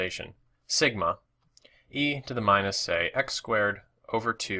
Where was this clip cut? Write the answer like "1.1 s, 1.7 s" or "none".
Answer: 3.6 s